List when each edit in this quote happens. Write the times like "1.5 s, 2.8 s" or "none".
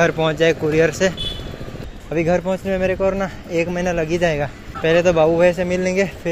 1.7 s, 4.6 s